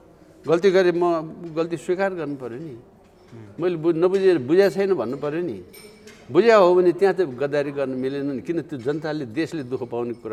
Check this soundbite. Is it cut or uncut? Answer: uncut